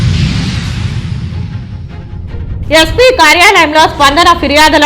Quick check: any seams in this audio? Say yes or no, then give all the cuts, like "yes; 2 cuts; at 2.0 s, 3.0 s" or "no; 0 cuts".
yes; 1 cut; at 2.6 s